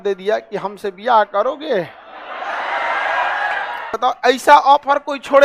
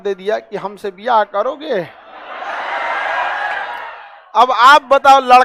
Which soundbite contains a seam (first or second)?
first